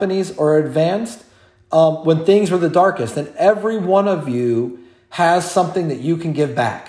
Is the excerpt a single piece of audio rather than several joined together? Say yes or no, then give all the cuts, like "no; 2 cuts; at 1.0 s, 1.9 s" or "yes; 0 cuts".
yes; 0 cuts